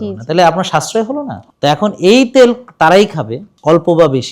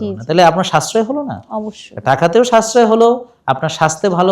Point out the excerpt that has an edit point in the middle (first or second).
first